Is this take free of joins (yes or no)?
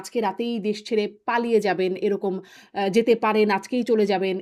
yes